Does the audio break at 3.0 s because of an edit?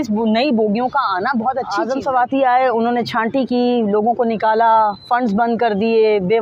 no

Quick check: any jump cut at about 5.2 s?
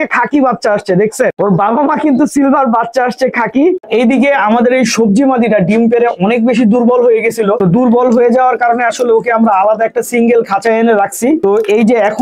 no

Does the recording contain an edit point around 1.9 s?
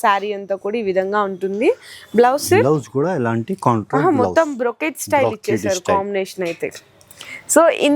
no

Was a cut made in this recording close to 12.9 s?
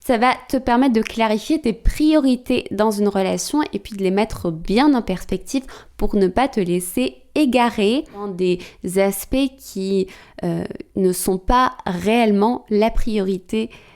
no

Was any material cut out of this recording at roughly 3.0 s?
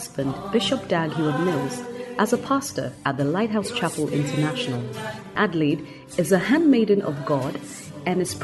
no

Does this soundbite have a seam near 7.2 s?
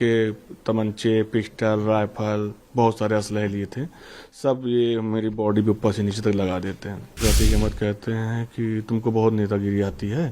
yes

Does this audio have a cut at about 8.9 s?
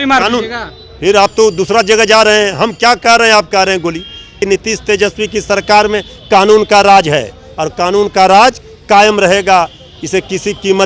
no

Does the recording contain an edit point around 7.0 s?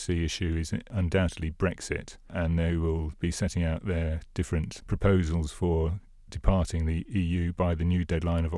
yes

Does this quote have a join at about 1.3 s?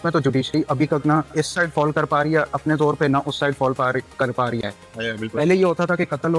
yes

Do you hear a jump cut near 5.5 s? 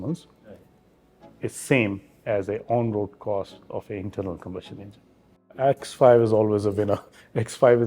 yes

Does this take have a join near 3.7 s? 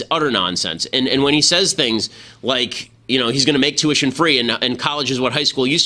no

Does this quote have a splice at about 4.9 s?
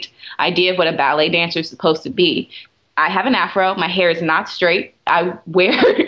no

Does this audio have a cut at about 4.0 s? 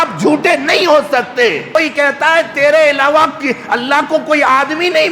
no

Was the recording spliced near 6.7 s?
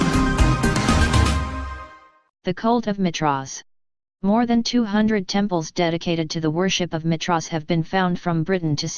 yes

